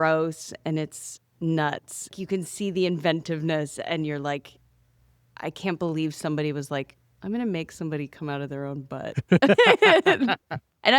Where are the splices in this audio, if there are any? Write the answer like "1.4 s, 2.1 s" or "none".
2.2 s